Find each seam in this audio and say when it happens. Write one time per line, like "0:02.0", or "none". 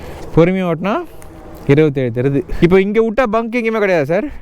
0:02.5